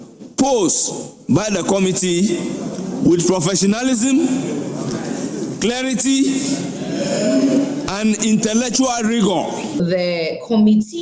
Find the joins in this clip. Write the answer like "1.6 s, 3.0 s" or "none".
9.8 s

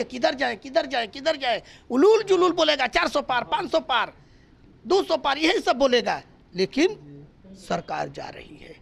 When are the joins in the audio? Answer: none

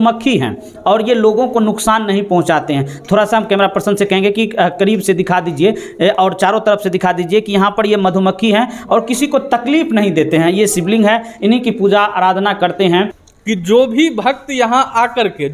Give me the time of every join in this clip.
13.2 s

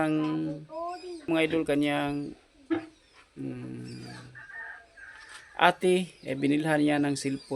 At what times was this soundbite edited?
1.3 s

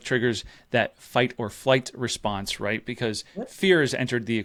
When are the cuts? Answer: none

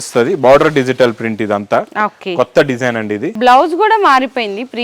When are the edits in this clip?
3.3 s

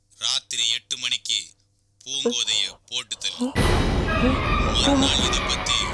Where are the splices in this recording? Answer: none

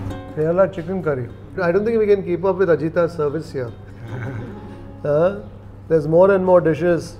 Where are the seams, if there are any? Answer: none

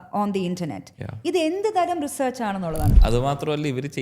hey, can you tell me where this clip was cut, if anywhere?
2.9 s

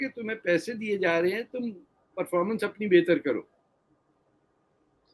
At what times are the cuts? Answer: none

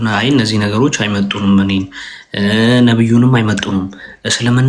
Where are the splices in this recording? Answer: none

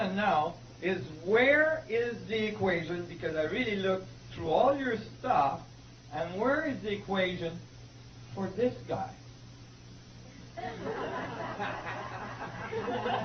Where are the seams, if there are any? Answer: none

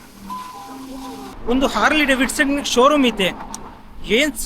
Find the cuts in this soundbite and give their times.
1.3 s

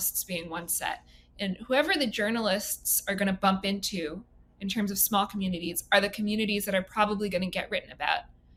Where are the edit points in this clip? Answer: none

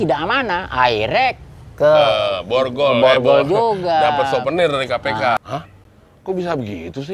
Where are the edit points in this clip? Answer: none

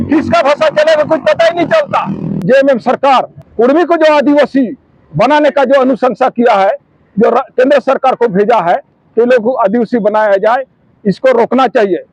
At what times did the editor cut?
2.4 s, 3.4 s

